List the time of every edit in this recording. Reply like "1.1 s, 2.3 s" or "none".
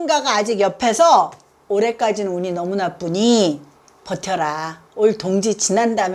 none